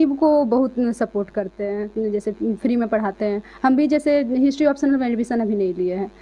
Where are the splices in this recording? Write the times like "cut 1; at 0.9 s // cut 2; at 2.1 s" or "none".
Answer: none